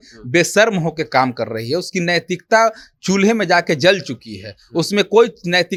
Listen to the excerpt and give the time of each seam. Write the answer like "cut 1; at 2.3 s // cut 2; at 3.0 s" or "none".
none